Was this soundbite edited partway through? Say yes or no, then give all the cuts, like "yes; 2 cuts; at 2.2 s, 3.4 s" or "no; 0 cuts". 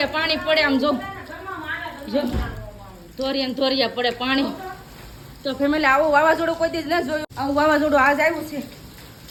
no; 0 cuts